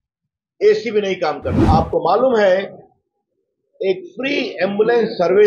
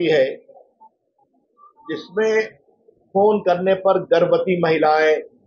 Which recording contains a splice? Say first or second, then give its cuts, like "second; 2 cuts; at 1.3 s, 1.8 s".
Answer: first; 1 cut; at 1.6 s